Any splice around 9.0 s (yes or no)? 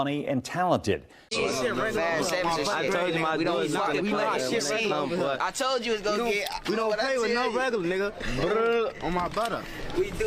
no